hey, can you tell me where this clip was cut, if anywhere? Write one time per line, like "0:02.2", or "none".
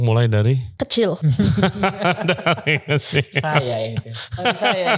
0:01.1